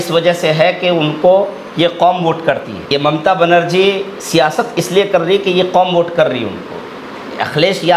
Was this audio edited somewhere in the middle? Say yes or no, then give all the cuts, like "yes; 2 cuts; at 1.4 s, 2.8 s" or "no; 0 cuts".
yes; 1 cut; at 2.8 s